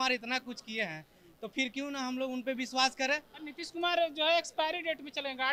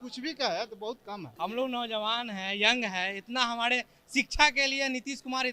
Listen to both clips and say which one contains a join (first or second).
second